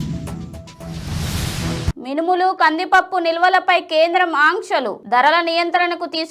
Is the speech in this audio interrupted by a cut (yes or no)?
no